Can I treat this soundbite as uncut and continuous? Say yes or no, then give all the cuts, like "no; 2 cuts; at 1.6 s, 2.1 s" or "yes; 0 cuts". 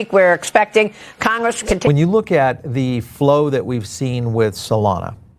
no; 1 cut; at 1.9 s